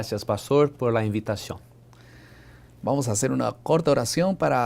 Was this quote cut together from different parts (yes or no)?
yes